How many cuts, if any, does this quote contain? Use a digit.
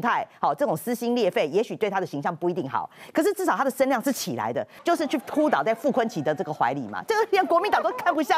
1